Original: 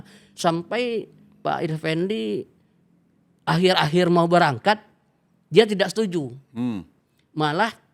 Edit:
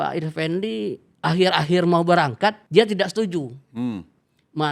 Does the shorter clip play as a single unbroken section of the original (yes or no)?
no